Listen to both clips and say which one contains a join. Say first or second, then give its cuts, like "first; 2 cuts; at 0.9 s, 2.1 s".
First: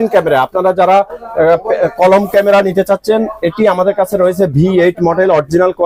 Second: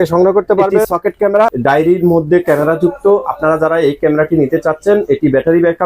second; 1 cut; at 1.1 s